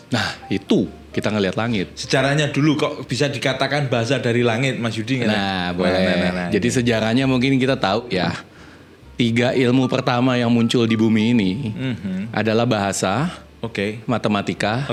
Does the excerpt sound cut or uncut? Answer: uncut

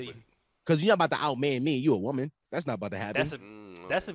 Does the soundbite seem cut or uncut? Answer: cut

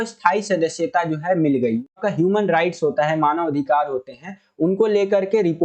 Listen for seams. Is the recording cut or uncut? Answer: cut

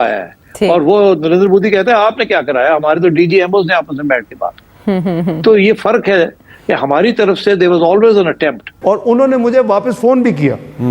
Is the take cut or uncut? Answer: cut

